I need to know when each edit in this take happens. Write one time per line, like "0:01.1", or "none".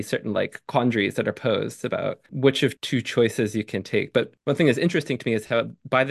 0:02.2

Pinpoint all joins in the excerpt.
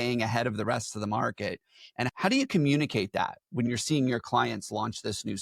0:02.1
0:03.7

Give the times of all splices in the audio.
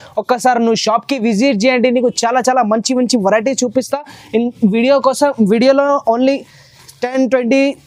none

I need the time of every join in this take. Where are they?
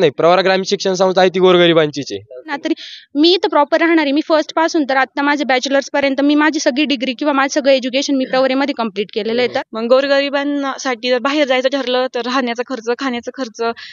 0:02.6
0:09.6

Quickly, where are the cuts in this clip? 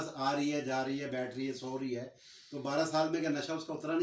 none

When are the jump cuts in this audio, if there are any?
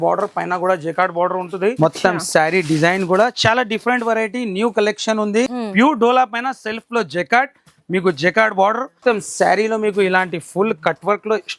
0:01.8
0:05.6
0:08.9

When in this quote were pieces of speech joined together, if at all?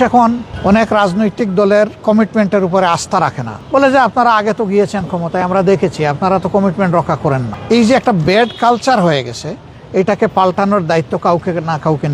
none

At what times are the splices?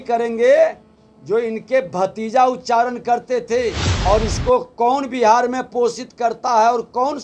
0:03.9

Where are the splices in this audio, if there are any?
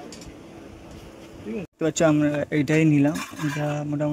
0:01.7

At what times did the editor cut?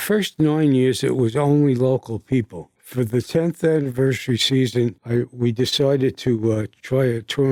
none

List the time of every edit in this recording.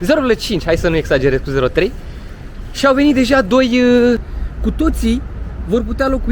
0:04.3

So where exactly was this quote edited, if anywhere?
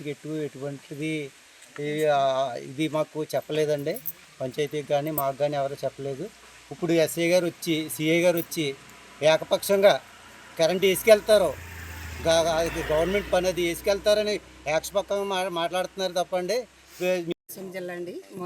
0:17.4

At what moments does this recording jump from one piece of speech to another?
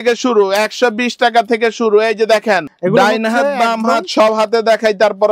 0:02.7

